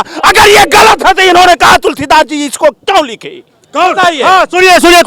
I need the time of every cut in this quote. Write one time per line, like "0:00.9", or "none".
none